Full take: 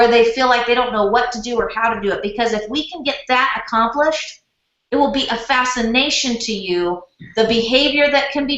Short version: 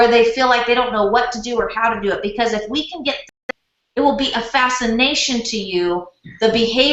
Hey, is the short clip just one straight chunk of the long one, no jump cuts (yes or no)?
no